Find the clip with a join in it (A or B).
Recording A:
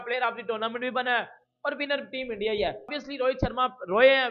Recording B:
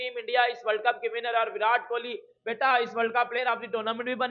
A